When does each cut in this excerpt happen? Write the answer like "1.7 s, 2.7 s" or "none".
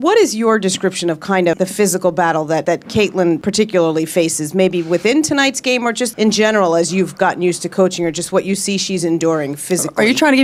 none

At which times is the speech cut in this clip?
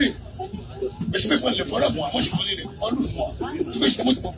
3.4 s

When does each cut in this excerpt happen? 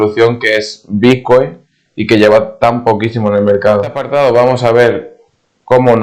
4.0 s

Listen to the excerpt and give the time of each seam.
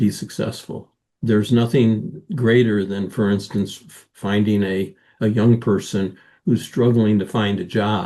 none

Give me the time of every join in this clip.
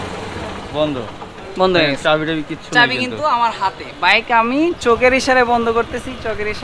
none

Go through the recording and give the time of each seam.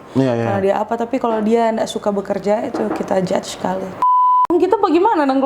4.1 s

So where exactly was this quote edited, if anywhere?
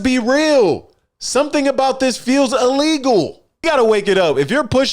3.4 s

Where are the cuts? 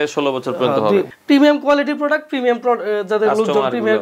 1.1 s

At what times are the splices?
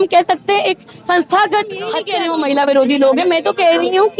2.0 s

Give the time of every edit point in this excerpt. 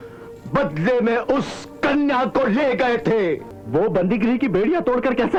none

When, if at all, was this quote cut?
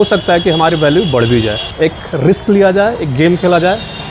1.6 s

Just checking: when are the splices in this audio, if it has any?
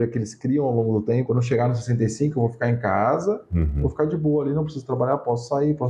1.2 s

